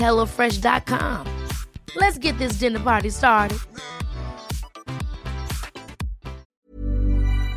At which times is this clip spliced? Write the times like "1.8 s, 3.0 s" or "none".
6.5 s